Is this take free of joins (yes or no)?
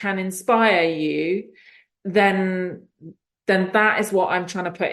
yes